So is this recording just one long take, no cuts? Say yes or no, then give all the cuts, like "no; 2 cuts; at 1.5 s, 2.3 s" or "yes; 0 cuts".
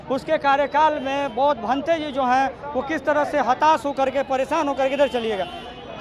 yes; 0 cuts